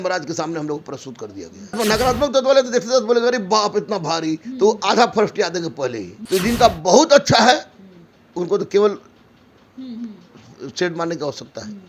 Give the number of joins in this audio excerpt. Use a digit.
2